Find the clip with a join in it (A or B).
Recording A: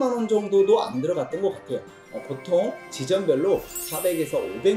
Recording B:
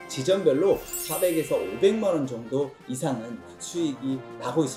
A